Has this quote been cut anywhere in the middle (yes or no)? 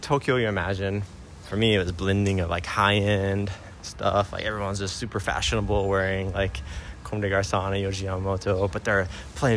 yes